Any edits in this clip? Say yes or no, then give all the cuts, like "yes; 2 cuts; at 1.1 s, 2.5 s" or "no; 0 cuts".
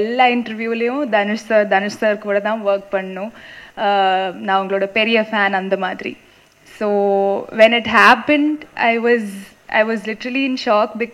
no; 0 cuts